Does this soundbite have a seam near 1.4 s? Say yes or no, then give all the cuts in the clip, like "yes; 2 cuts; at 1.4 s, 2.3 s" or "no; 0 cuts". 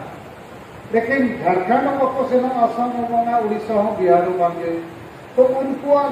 no; 0 cuts